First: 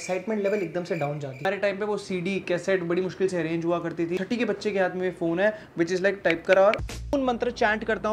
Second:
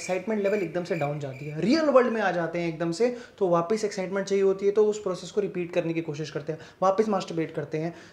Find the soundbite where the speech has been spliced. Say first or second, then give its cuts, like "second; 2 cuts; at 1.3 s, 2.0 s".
first; 3 cuts; at 1.4 s, 4.2 s, 7.1 s